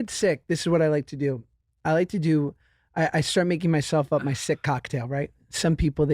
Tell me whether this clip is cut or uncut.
uncut